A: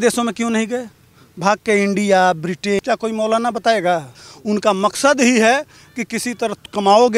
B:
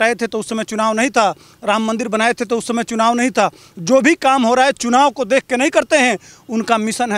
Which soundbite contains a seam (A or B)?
A